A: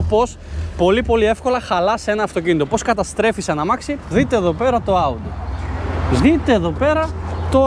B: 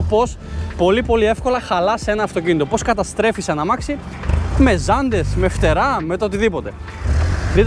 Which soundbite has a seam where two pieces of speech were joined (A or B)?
A